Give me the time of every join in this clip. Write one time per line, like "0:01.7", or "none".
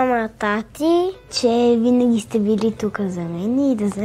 0:01.2